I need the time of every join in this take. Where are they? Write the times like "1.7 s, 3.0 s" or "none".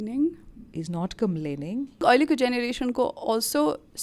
2.0 s